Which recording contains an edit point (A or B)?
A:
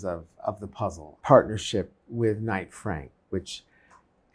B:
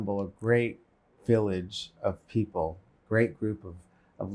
A